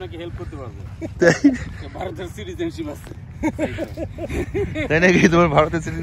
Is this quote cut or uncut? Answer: uncut